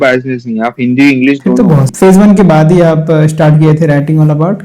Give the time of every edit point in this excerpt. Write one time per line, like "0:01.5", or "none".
0:01.9